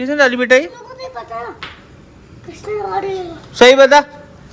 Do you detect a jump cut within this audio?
no; 0 cuts

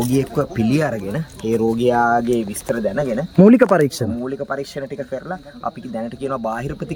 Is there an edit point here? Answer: no; 0 cuts

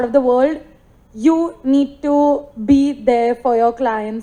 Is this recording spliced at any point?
no; 0 cuts

